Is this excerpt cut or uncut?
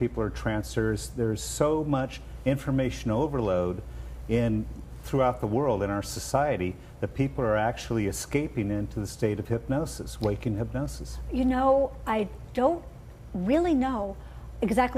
uncut